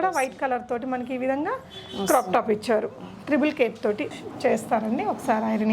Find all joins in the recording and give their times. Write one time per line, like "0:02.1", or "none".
0:04.1